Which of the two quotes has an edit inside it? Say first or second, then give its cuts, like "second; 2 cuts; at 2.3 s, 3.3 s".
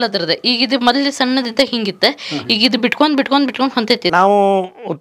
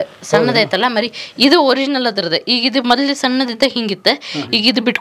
first; 1 cut; at 4.0 s